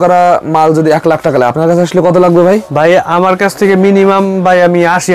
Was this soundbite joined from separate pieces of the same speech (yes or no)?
no